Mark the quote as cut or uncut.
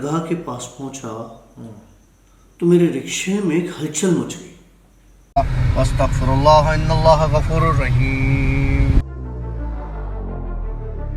cut